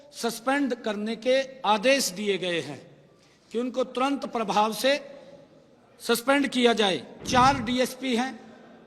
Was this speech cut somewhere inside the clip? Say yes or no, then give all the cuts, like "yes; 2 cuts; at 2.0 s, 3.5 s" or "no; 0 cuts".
yes; 1 cut; at 7.1 s